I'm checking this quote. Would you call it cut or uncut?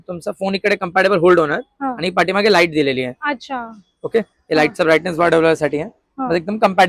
uncut